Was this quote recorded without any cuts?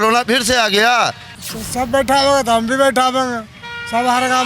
no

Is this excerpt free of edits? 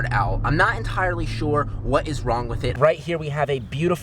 no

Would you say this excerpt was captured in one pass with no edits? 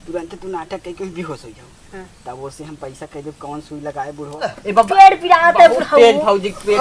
no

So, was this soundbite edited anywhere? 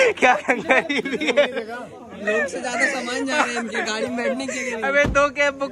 no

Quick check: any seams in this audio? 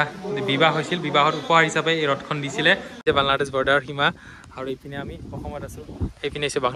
yes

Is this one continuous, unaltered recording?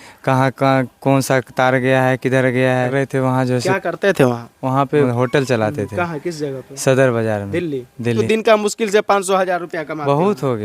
no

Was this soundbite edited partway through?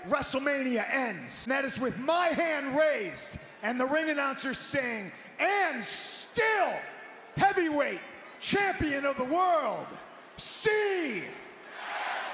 yes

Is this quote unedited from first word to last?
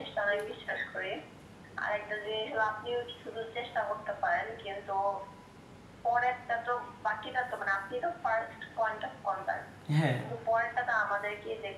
yes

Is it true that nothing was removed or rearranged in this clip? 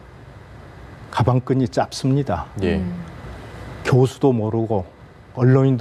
yes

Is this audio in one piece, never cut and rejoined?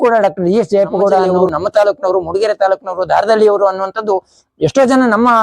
no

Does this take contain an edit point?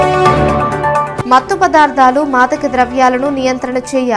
no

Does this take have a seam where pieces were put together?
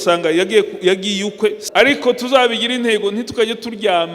yes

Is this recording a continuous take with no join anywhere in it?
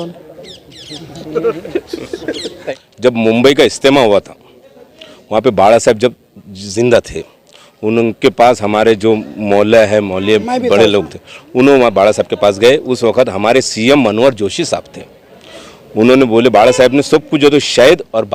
no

